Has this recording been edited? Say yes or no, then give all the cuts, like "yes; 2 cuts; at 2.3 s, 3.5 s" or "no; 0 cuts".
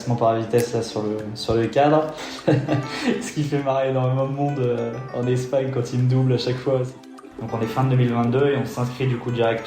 yes; 2 cuts; at 2.3 s, 7.0 s